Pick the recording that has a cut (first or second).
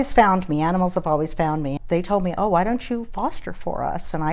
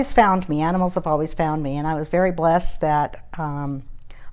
first